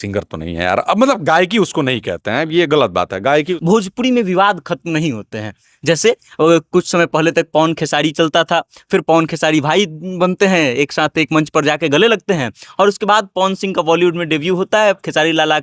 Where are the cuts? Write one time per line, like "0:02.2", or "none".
0:03.5